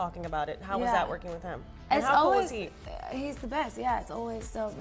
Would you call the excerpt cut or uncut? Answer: uncut